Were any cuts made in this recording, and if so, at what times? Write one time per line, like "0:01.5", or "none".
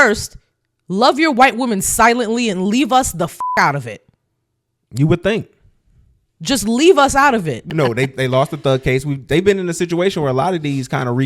0:07.6